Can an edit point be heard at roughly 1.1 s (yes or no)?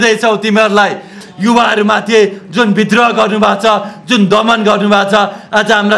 yes